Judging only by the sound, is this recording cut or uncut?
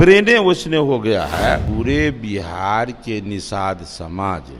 cut